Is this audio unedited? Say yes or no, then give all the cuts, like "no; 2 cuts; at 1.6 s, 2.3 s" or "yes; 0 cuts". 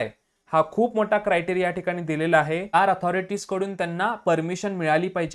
no; 1 cut; at 2.7 s